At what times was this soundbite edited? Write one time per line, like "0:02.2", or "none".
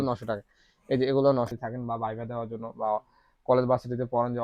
0:01.5